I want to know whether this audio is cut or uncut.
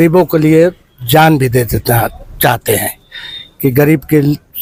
uncut